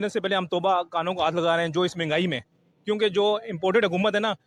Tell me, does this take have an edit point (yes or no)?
no